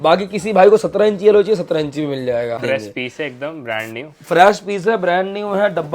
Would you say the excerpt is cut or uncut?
cut